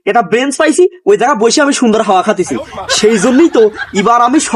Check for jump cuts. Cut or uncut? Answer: uncut